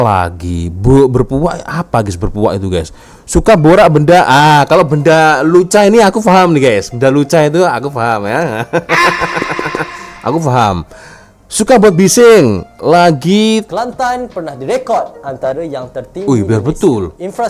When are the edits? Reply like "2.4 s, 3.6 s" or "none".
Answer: 13.7 s